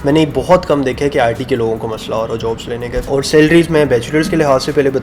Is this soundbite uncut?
no; 1 cut; at 3.1 s

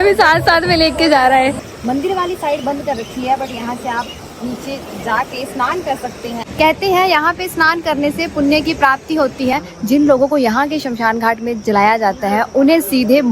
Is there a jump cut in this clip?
yes; 3 cuts; at 1.6 s, 6.4 s, 9.5 s

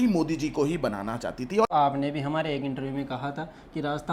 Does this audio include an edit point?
yes; 1 cut; at 1.7 s

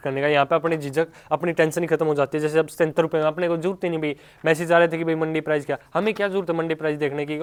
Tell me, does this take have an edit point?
no; 0 cuts

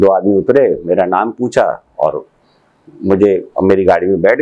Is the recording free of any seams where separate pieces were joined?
yes; 0 cuts

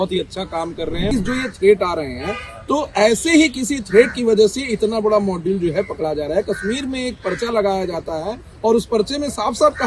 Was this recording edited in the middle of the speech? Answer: yes; 1 cut; at 1.1 s

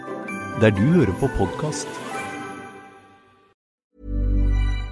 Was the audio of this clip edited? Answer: yes; 1 cut; at 3.8 s

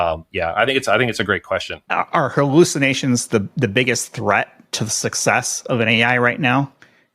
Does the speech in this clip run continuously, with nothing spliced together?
no; 1 cut; at 1.8 s

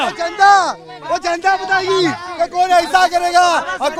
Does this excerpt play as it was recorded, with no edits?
yes; 0 cuts

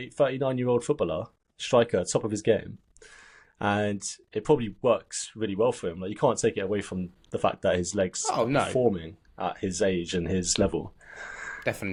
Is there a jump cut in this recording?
no; 0 cuts

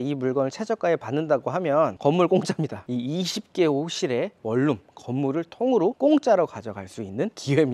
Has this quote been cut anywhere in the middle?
no; 0 cuts

